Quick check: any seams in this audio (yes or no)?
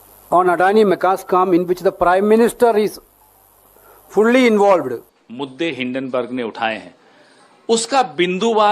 yes